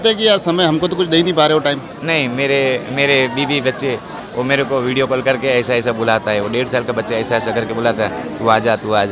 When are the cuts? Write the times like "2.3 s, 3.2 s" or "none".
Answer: 4.2 s